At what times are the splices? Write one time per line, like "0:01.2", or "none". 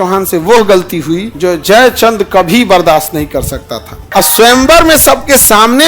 0:01.3
0:03.9